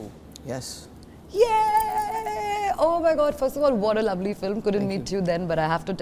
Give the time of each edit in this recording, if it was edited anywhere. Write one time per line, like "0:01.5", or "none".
none